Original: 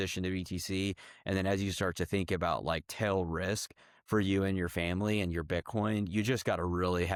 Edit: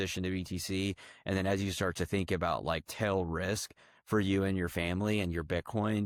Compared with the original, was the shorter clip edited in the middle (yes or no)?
no